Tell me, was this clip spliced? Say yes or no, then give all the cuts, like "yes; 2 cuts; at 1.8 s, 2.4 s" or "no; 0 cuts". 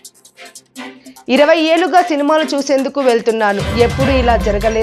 no; 0 cuts